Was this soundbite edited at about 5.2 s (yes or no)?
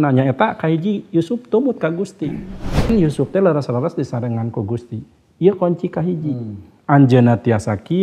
no